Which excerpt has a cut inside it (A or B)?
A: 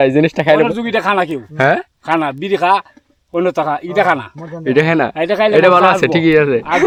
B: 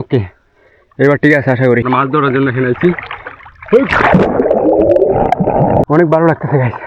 B